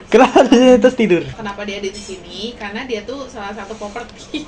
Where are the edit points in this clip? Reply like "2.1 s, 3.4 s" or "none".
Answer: none